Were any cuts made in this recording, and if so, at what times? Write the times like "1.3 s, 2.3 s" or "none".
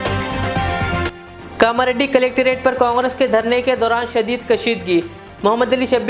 1.1 s